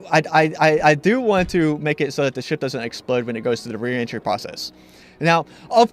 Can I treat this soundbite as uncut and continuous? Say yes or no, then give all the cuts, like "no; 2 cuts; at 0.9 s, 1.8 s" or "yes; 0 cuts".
yes; 0 cuts